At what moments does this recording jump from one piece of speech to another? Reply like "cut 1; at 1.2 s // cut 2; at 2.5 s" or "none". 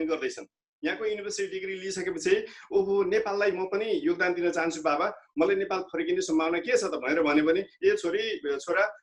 none